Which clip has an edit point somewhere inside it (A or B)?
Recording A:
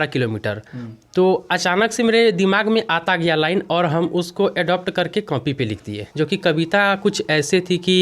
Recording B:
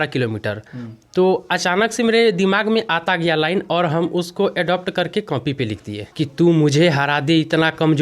B